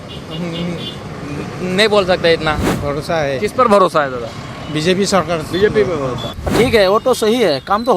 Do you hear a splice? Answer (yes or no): yes